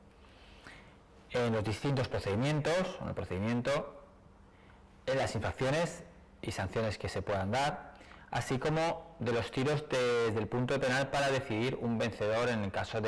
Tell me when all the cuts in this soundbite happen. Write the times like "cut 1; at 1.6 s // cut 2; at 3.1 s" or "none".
cut 1; at 6.7 s

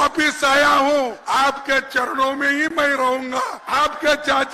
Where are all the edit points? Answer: cut 1; at 1.2 s // cut 2; at 3.6 s

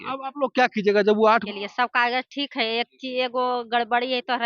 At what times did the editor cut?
cut 1; at 1.4 s

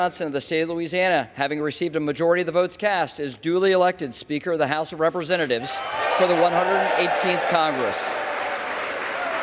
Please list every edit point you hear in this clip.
none

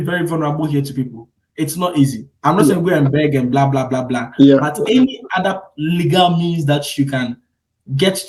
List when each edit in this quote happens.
none

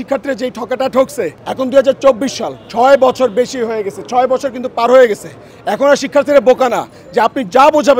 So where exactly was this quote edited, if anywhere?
cut 1; at 1.4 s

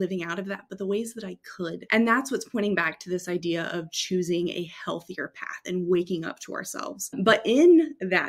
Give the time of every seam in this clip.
cut 1; at 1.8 s // cut 2; at 7.2 s

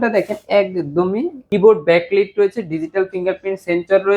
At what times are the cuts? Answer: cut 1; at 1.4 s

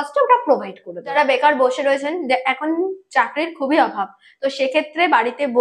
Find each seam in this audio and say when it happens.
cut 1; at 1.1 s

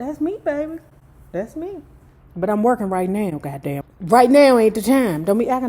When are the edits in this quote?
cut 1; at 3.8 s

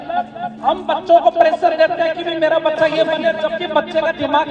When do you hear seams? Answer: none

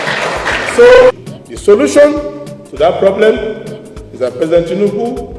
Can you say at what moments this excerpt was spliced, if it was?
cut 1; at 1.1 s

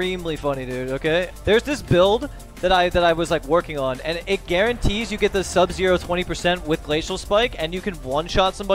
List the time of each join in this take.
cut 1; at 1.3 s // cut 2; at 4.2 s

